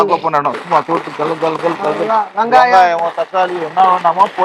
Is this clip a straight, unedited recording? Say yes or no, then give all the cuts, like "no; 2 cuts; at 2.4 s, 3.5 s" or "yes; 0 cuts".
yes; 0 cuts